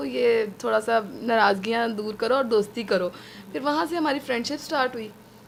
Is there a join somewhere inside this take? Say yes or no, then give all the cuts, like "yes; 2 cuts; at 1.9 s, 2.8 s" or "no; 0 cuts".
no; 0 cuts